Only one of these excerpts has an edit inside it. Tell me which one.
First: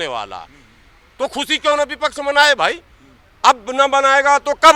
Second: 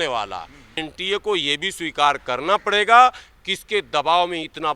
second; 1 cut; at 0.9 s

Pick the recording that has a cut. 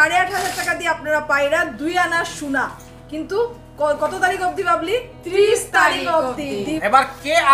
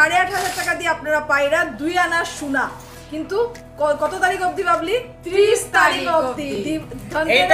first; 1 cut; at 6.5 s

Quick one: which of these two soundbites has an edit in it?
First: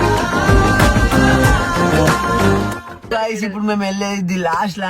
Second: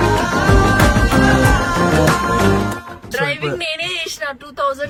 first; 1 cut; at 3.1 s

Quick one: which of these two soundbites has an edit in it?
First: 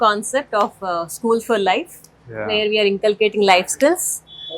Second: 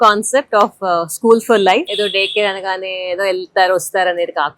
second; 1 cut; at 1.9 s

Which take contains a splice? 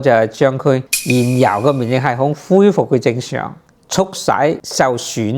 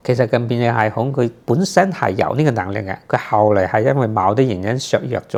first; 2 cuts; at 0.9 s, 3.8 s

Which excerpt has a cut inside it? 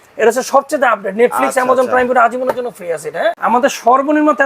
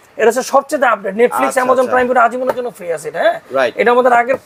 first; 1 cut; at 3.4 s

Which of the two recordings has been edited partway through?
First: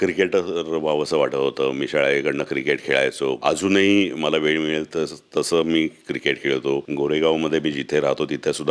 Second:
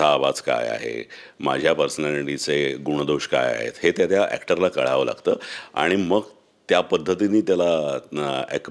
first; 2 cuts; at 3.4 s, 6.9 s

